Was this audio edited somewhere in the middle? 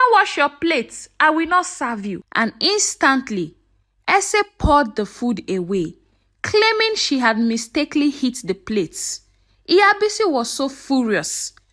yes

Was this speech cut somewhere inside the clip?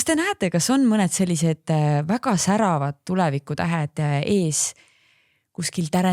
no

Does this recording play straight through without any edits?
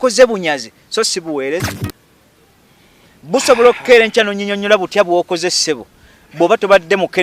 no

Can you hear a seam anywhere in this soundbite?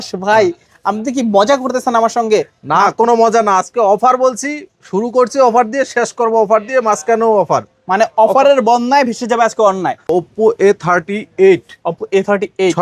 yes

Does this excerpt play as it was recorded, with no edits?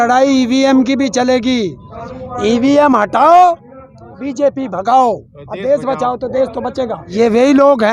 no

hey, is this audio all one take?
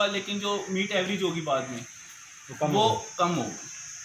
yes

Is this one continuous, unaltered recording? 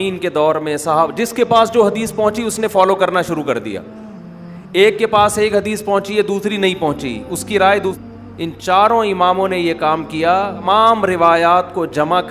no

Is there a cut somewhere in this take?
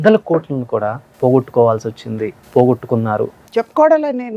yes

